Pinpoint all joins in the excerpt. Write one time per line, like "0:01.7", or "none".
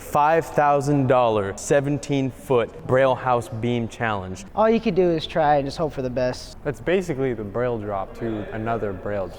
0:01.5
0:02.8
0:04.4
0:06.4
0:08.3